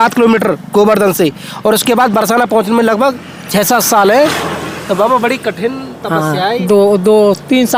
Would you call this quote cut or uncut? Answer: uncut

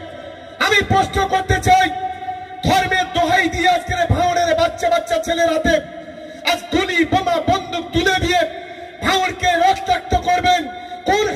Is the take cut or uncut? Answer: uncut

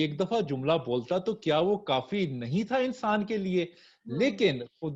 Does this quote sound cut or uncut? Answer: uncut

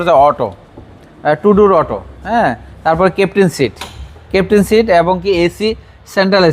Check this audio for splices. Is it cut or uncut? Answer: uncut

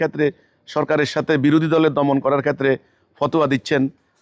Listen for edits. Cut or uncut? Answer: uncut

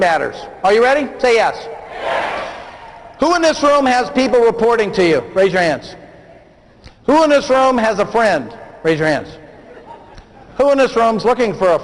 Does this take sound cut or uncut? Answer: uncut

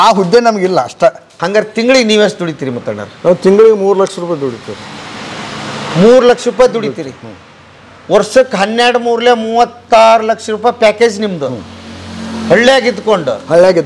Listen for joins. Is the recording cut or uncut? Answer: cut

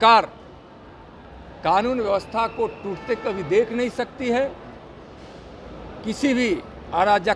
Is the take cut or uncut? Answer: uncut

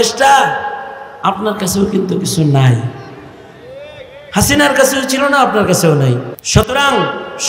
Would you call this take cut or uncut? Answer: cut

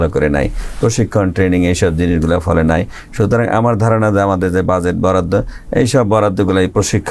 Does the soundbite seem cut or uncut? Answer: uncut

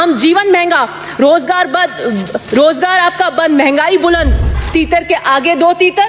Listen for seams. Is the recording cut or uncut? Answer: cut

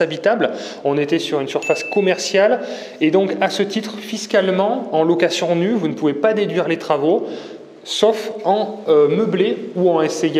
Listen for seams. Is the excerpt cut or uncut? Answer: uncut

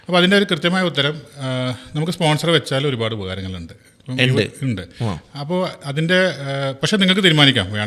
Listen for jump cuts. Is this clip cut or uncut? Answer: uncut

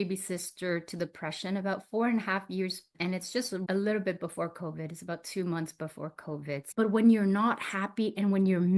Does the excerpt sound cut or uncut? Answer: cut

